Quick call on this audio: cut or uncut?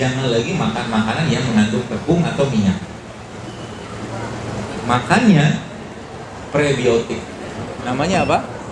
uncut